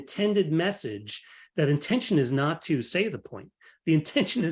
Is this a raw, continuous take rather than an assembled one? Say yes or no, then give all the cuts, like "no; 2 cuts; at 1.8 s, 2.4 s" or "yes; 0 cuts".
yes; 0 cuts